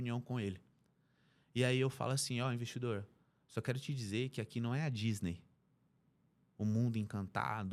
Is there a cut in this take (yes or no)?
no